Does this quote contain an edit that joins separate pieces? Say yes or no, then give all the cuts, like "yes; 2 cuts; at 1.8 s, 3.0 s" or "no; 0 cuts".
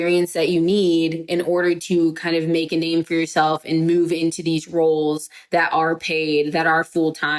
no; 0 cuts